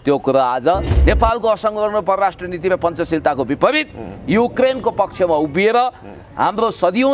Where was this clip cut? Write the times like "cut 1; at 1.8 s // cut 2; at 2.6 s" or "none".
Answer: cut 1; at 0.9 s